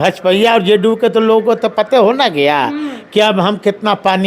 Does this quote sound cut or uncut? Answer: uncut